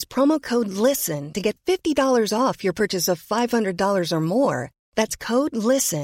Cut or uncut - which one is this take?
uncut